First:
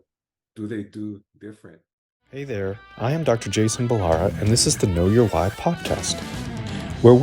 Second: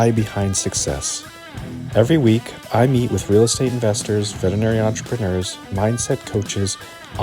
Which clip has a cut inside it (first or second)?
first